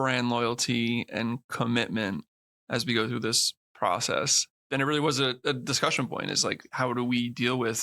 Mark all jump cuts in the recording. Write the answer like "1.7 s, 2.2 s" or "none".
4.5 s